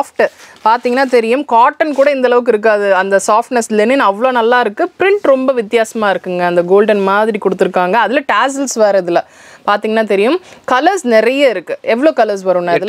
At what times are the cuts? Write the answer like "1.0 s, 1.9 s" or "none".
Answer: none